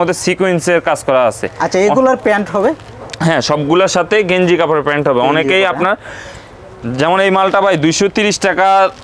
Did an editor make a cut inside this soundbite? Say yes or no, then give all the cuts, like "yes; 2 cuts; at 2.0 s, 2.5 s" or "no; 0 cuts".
no; 0 cuts